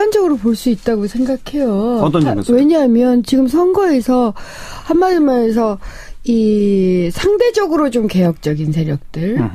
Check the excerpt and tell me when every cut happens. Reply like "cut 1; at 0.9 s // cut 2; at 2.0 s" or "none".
none